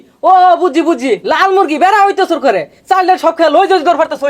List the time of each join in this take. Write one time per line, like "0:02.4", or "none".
none